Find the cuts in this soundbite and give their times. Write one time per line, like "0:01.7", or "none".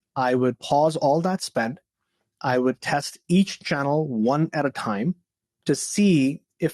none